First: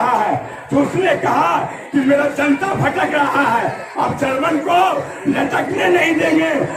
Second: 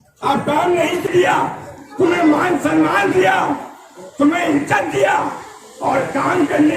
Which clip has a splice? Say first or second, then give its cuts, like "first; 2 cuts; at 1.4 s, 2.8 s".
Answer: second; 1 cut; at 1.0 s